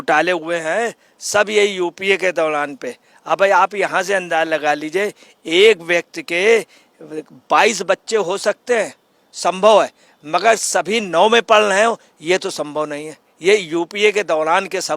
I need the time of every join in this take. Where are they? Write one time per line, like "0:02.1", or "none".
none